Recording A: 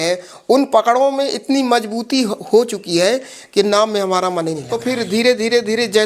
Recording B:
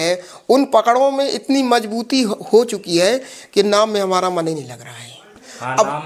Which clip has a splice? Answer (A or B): A